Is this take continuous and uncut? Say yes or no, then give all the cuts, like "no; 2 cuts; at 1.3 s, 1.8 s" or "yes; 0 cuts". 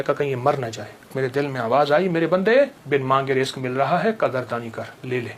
no; 2 cuts; at 1.1 s, 2.8 s